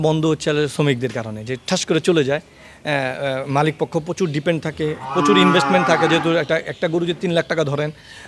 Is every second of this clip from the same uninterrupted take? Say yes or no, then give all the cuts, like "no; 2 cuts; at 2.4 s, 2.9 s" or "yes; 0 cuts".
yes; 0 cuts